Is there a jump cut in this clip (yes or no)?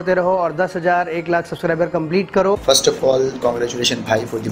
yes